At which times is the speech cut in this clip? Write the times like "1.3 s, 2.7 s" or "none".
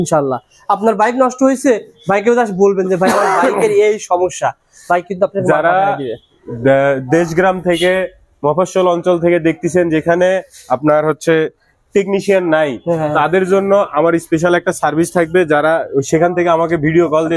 none